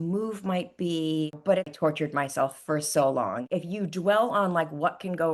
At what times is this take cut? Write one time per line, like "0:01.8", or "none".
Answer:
0:01.7
0:03.5